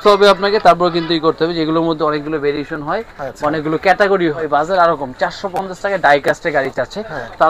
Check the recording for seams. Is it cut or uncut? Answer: cut